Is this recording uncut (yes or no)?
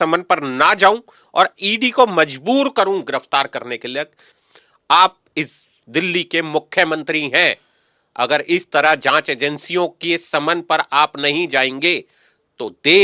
no